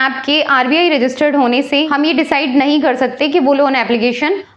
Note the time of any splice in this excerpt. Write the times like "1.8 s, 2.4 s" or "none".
none